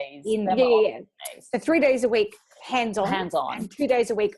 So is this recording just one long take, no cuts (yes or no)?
yes